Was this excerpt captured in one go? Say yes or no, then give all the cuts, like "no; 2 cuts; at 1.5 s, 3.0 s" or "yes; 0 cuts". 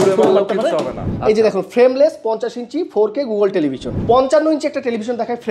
no; 2 cuts; at 1.1 s, 3.9 s